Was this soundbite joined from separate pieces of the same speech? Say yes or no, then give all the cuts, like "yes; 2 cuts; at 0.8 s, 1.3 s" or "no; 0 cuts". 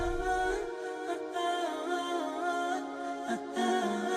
no; 0 cuts